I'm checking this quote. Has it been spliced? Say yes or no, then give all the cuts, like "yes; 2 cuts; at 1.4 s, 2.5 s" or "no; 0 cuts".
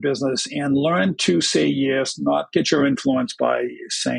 yes; 1 cut; at 2.5 s